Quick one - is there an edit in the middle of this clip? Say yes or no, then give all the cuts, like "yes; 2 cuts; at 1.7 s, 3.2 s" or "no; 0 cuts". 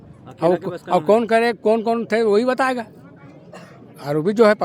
no; 0 cuts